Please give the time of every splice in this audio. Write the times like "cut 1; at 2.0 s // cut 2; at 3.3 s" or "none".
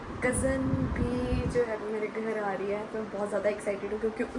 none